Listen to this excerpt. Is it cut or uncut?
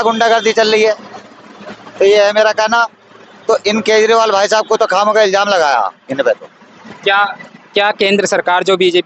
uncut